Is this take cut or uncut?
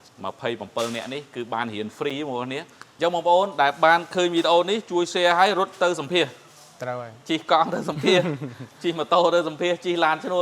cut